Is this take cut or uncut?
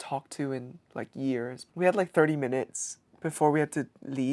cut